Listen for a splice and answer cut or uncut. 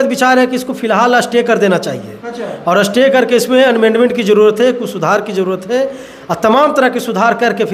uncut